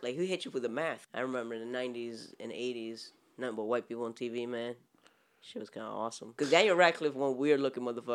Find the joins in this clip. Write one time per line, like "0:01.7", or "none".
0:01.0
0:06.2

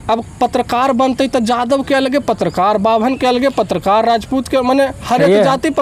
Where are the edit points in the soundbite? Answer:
none

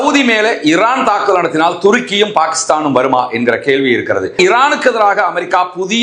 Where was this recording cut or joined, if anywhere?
0:04.3

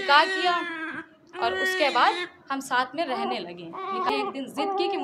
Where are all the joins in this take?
0:04.1

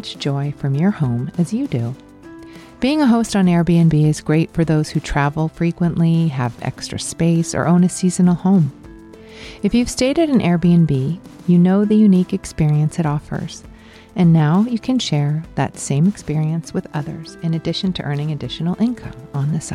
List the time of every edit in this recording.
none

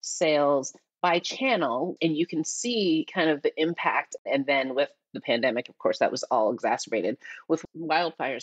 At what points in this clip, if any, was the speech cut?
0:01.9
0:04.2

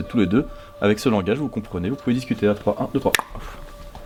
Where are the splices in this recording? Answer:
none

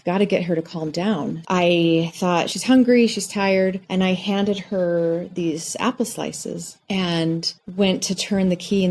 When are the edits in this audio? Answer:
0:01.4

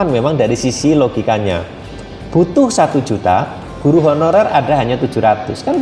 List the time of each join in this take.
none

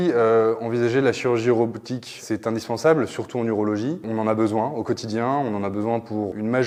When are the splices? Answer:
none

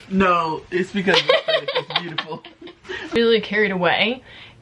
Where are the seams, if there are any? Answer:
0:03.2

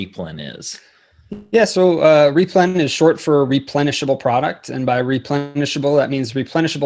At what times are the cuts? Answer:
none

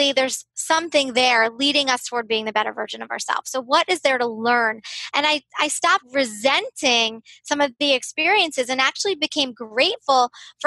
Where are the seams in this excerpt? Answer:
0:06.1

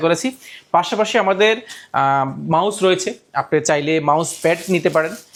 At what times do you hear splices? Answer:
none

